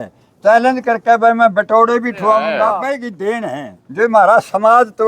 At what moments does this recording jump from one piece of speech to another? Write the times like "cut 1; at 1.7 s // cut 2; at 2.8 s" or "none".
cut 1; at 2.6 s